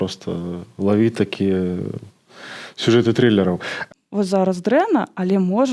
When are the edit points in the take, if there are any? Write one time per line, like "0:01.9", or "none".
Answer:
0:03.8